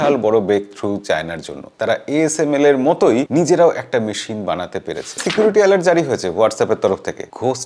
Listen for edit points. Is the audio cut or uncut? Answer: cut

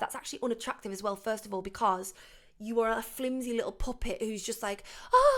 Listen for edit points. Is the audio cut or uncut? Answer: uncut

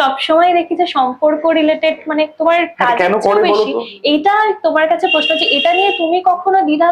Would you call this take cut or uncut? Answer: uncut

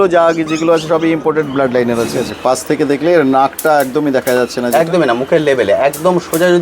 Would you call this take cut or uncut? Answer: cut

